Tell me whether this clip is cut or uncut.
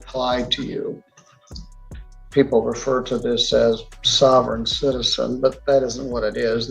uncut